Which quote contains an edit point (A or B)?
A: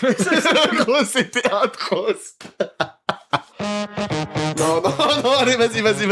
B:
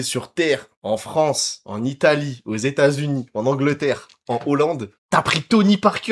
A